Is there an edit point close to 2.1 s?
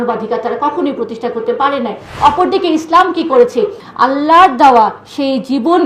yes; 2 cuts; at 2.1 s, 3.8 s

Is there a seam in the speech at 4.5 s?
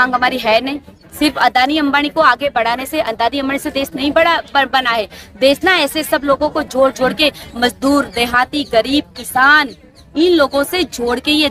no; 1 cut; at 1.0 s

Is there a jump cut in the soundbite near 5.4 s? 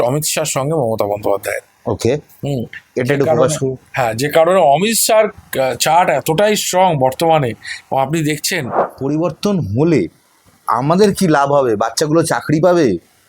no; 1 cut; at 8.8 s

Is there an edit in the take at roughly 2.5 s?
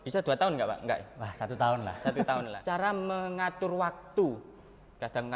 yes; 1 cut; at 2.5 s

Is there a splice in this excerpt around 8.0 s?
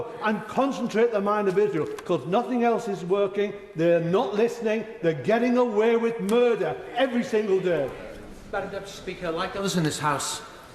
yes; 1 cut; at 8.0 s

